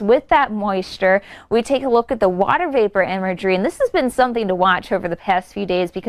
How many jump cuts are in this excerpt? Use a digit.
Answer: 1